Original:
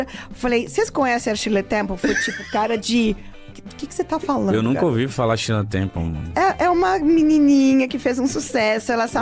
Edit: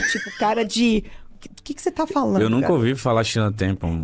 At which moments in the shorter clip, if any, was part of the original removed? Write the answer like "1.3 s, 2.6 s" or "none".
none